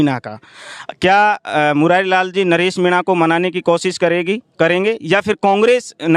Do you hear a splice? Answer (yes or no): no